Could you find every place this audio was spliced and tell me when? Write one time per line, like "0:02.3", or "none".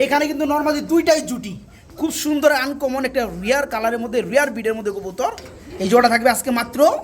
0:05.5